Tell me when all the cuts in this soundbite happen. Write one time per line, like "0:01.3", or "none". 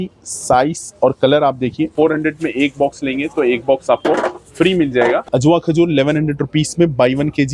0:01.9
0:05.2